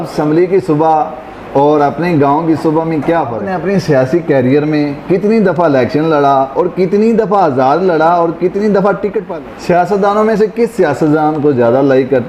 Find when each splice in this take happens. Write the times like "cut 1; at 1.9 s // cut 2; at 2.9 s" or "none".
cut 1; at 3.4 s // cut 2; at 9.3 s